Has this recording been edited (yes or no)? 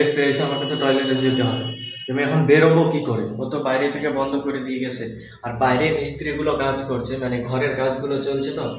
no